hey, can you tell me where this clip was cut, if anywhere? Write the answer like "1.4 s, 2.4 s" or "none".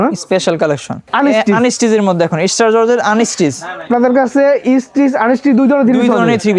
1.1 s, 3.7 s